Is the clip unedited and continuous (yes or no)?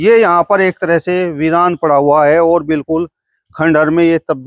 yes